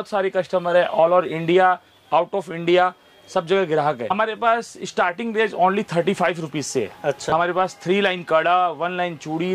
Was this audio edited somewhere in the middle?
yes; 2 cuts; at 4.1 s, 7.2 s

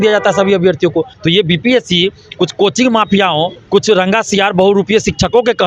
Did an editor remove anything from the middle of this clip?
yes; 2 cuts; at 1.1 s, 3.6 s

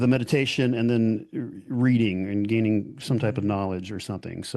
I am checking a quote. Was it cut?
no; 0 cuts

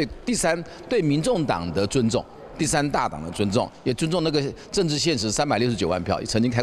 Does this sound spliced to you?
no; 0 cuts

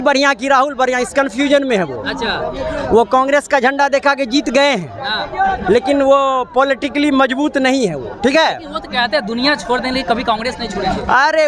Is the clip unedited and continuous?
yes; 0 cuts

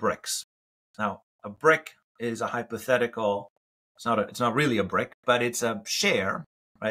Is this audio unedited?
yes; 0 cuts

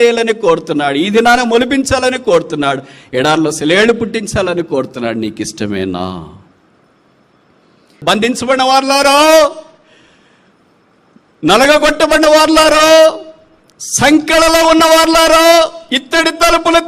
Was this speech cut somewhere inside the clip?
yes; 1 cut; at 8.0 s

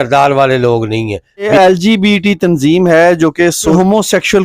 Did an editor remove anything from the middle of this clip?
yes; 1 cut; at 1.5 s

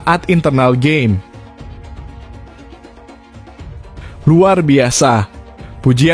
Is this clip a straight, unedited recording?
no; 2 cuts; at 1.3 s, 4.2 s

